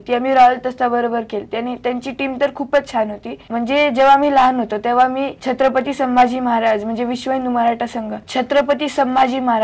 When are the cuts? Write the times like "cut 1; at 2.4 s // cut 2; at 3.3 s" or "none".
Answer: cut 1; at 3.3 s // cut 2; at 8.2 s